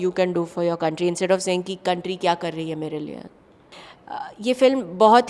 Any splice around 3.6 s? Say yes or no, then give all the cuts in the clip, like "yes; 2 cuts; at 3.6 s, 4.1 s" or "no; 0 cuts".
yes; 1 cut; at 3.6 s